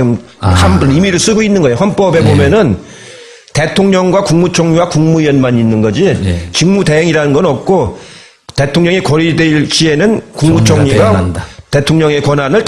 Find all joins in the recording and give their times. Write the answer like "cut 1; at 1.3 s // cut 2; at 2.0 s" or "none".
cut 1; at 7.7 s

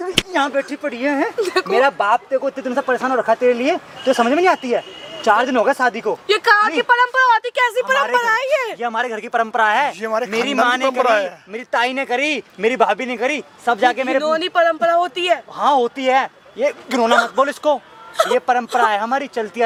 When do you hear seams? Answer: none

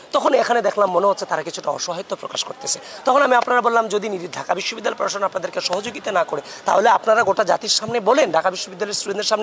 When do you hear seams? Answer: none

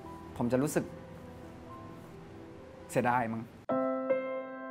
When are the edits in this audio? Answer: cut 1; at 3.6 s

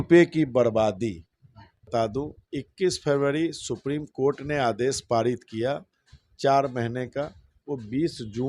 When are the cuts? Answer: cut 1; at 1.9 s

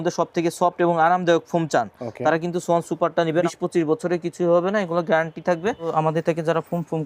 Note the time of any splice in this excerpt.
cut 1; at 3.4 s // cut 2; at 5.8 s

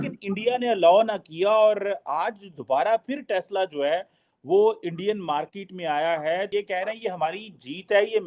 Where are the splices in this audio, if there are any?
cut 1; at 6.5 s

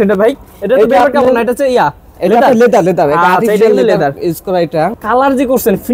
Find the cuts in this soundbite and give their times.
cut 1; at 4.9 s

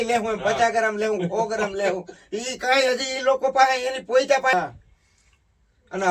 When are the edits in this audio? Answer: cut 1; at 4.5 s

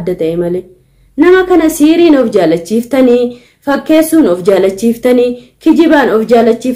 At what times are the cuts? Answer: none

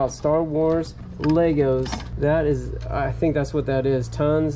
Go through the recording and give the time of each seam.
none

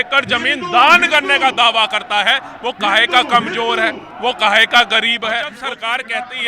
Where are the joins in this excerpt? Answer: cut 1; at 5.6 s

